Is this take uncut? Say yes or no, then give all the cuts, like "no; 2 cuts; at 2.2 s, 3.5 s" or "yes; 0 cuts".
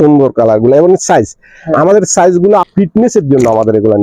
no; 1 cut; at 2.7 s